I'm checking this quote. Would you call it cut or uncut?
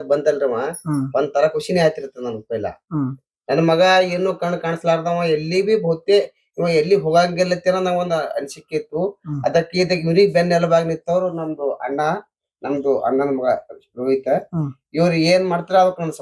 uncut